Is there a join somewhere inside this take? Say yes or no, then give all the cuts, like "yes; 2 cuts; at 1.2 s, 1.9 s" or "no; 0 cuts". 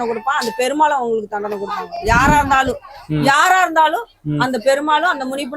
no; 0 cuts